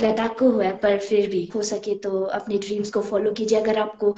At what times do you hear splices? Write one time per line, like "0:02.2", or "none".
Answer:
0:01.5

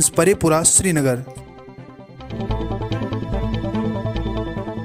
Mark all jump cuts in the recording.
0:02.3

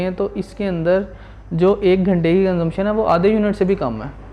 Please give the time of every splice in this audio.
none

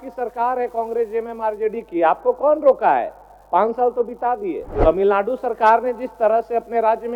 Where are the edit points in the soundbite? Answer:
0:04.7

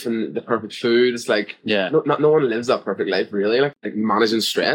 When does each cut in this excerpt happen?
0:03.8

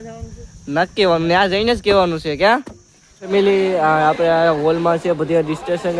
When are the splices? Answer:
0:03.3

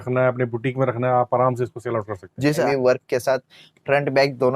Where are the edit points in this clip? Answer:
0:02.6

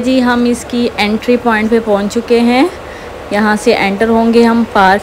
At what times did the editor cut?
none

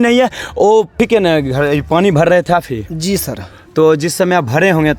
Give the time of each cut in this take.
0:00.9

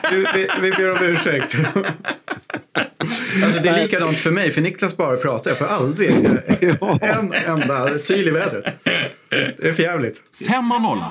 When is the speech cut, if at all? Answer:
0:10.1

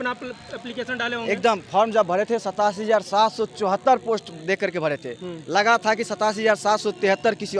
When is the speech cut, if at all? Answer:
none

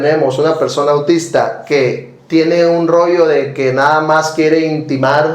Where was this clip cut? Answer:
none

